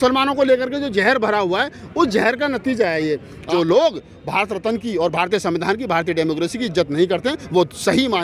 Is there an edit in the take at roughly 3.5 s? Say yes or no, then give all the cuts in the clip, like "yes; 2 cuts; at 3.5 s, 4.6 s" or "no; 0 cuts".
yes; 1 cut; at 3.5 s